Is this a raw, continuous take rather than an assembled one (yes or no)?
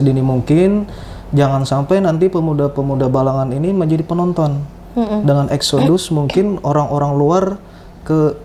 yes